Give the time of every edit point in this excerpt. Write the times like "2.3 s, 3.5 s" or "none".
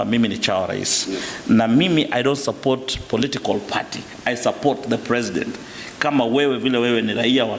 none